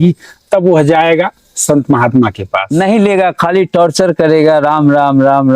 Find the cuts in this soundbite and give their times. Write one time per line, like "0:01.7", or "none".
0:02.7